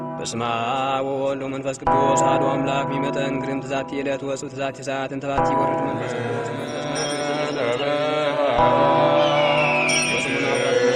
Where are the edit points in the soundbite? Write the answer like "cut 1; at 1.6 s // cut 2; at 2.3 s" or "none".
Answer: none